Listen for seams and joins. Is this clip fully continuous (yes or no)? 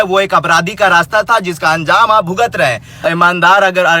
no